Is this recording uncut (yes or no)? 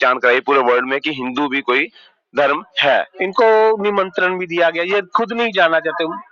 no